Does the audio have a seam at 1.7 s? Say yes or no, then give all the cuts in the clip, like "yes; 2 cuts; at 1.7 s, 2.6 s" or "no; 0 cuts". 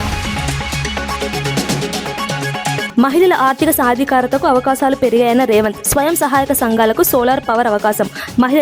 no; 1 cut; at 2.9 s